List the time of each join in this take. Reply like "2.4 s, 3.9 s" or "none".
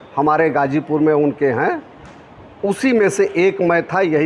none